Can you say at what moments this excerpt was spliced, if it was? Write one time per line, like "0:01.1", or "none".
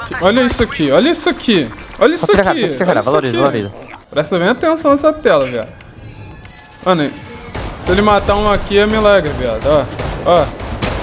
0:04.0